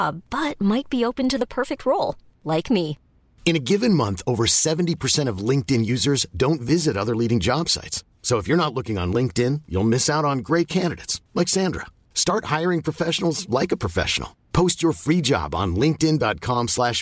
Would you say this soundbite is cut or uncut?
uncut